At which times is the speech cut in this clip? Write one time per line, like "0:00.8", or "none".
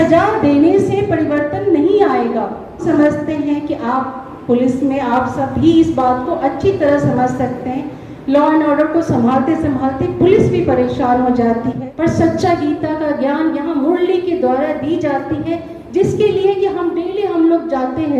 0:02.8
0:11.8